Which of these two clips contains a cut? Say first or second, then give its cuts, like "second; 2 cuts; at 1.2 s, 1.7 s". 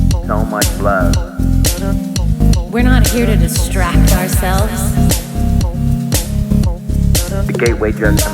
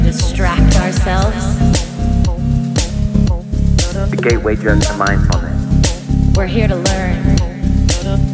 first; 1 cut; at 2.2 s